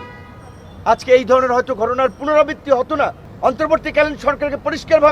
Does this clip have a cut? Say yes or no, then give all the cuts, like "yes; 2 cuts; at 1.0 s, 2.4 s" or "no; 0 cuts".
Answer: yes; 1 cut; at 3.2 s